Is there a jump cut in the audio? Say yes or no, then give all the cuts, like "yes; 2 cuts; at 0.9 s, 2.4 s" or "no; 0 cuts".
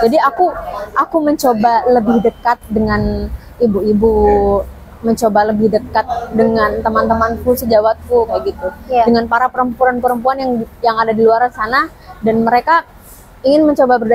no; 0 cuts